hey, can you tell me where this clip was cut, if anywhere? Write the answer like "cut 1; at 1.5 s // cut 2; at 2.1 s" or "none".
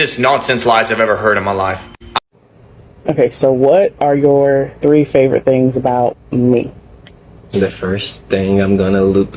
cut 1; at 2.2 s